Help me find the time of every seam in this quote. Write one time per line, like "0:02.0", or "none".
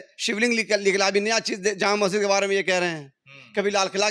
none